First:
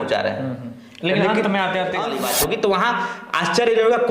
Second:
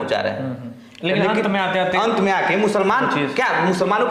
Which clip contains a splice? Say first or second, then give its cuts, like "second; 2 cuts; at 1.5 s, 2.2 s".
first; 1 cut; at 2.1 s